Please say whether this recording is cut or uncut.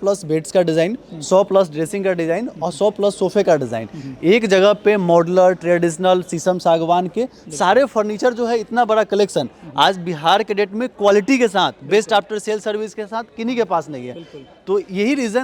uncut